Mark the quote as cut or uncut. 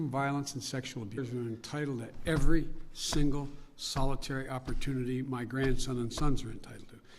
uncut